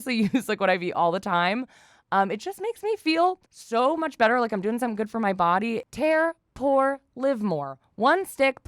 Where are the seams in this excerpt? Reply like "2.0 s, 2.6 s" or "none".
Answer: 3.5 s, 5.9 s